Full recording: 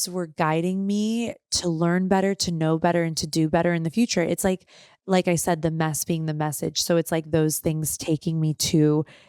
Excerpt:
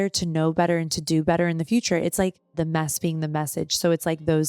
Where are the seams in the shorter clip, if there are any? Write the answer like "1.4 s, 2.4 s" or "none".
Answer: 2.5 s